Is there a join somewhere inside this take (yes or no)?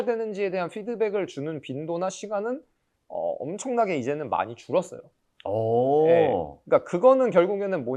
no